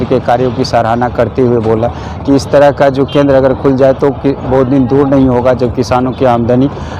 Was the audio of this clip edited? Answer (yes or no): no